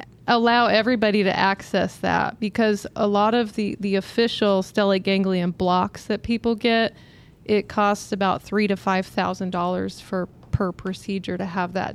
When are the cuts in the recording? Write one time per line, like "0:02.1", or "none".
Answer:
none